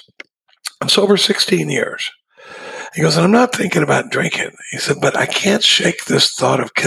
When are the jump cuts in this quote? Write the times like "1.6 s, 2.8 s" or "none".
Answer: none

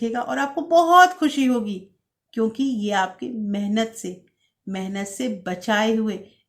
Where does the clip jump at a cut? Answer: none

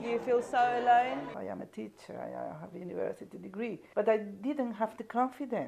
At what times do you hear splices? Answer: 1.3 s, 3.8 s

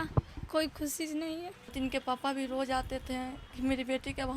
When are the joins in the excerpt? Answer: 1.7 s

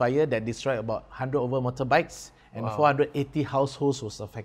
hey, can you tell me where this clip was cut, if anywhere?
none

